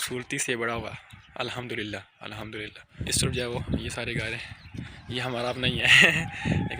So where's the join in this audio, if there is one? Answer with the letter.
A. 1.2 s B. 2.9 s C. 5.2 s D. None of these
B